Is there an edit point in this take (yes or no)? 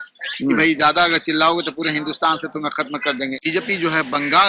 yes